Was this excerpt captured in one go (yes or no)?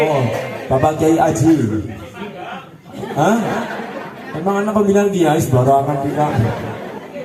yes